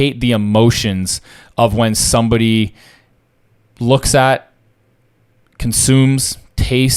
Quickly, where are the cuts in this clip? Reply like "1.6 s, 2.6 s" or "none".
none